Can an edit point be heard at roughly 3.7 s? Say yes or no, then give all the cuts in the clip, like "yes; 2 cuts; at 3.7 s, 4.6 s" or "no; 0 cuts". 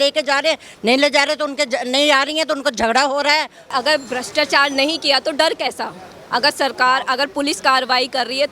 yes; 1 cut; at 3.7 s